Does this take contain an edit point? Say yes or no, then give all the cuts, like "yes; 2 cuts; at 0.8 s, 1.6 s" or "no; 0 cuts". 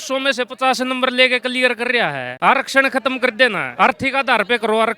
yes; 2 cuts; at 2.3 s, 3.6 s